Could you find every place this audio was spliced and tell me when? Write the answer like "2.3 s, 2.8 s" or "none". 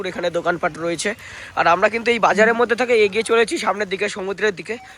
none